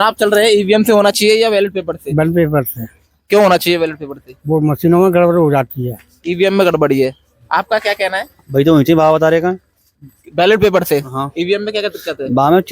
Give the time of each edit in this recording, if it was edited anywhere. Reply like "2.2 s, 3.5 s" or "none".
none